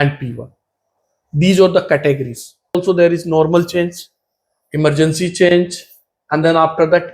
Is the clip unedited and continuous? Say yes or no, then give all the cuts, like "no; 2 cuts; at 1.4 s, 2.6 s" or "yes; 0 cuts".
no; 1 cut; at 2.8 s